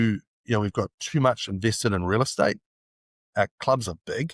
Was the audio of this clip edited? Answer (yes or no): no